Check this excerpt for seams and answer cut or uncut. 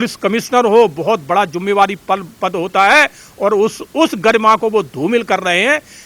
uncut